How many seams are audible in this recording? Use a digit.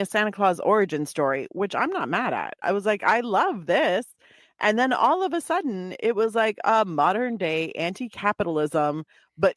1